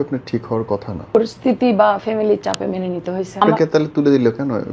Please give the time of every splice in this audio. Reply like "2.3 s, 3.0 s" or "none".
1.2 s, 3.4 s